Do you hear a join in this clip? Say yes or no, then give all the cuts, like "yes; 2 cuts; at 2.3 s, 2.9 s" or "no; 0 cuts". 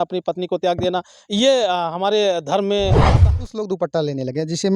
yes; 1 cut; at 3.3 s